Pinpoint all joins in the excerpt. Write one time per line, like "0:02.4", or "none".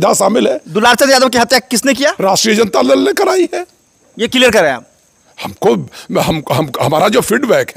none